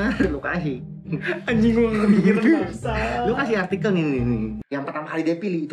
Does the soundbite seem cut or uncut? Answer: cut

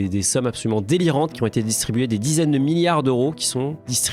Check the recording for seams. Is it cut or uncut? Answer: uncut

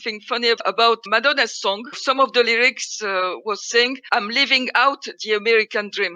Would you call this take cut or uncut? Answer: cut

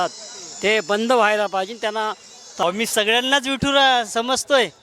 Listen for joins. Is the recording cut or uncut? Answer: cut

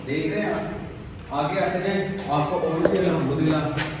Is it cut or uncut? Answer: uncut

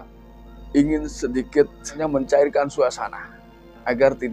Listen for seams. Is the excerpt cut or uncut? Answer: cut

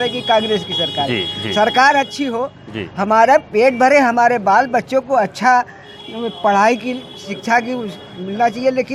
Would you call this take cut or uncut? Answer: uncut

